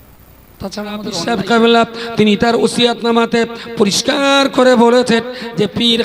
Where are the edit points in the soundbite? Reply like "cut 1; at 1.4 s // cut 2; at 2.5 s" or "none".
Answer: cut 1; at 1.2 s